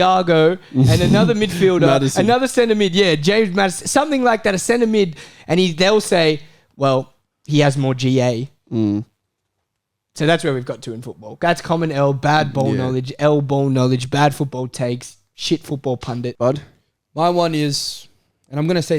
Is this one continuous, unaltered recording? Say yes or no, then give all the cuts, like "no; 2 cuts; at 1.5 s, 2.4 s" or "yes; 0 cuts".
no; 1 cut; at 16.3 s